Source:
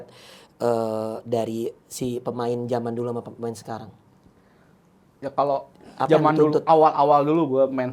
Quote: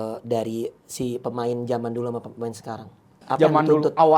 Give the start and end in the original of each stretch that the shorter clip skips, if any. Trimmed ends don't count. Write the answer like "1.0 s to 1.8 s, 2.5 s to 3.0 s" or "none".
4.1 s to 5.8 s